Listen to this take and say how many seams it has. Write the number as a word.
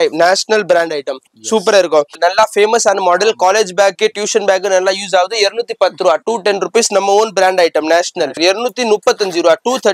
two